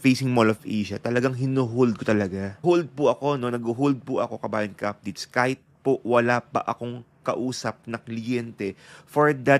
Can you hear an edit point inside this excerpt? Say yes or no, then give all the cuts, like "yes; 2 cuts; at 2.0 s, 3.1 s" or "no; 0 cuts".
yes; 1 cut; at 2.6 s